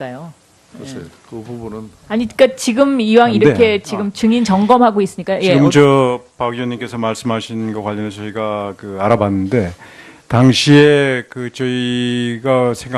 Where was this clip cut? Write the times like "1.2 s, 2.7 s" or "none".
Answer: 10.5 s